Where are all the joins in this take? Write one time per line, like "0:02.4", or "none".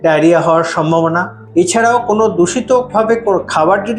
none